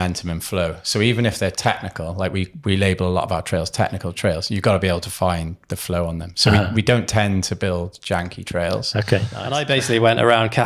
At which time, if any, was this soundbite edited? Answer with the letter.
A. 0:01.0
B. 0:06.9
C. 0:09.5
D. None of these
C